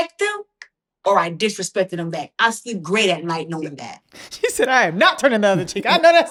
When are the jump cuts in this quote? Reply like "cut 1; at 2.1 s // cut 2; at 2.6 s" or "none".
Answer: none